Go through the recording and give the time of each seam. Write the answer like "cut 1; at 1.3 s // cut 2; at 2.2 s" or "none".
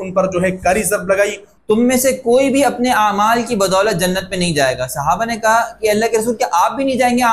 cut 1; at 1.5 s